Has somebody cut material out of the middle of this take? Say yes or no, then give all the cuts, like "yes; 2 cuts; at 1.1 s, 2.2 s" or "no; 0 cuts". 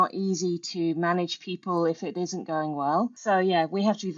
yes; 1 cut; at 3.2 s